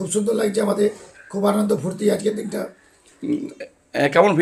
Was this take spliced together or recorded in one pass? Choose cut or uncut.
uncut